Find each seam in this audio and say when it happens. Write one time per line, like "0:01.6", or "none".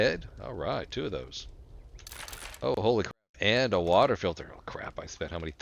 none